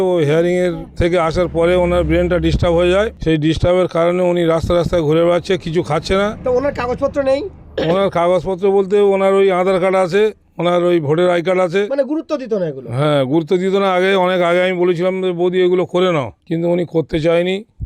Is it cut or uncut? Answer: uncut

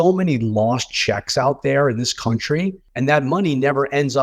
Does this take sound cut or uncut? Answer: cut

